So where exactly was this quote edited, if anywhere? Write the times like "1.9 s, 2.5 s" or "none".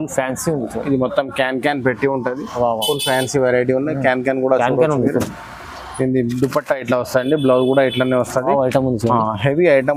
none